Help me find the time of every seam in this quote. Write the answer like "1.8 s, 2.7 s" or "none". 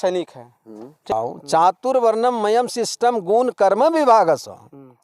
1.1 s